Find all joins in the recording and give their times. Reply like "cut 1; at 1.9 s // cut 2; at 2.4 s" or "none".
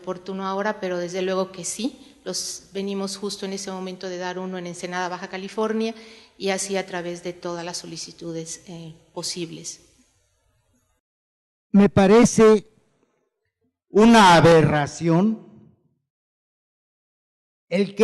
cut 1; at 8.0 s